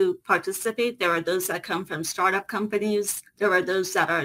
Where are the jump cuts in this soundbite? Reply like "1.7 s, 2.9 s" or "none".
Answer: 3.2 s